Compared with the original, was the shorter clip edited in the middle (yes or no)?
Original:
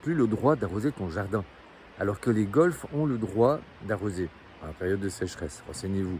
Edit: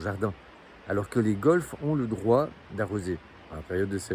no